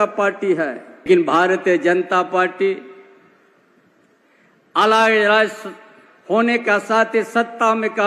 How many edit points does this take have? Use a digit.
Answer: 1